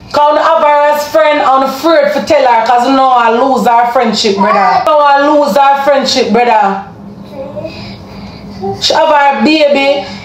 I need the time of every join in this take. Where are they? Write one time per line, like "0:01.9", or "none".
0:04.9